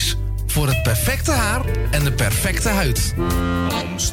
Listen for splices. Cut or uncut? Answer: cut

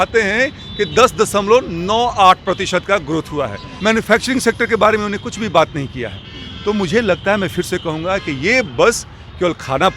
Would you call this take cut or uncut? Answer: cut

